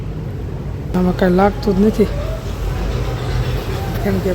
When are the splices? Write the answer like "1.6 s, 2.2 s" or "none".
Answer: 0.9 s